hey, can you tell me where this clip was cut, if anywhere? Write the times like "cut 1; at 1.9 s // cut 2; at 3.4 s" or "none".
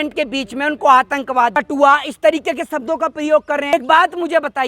cut 1; at 1.5 s // cut 2; at 3.7 s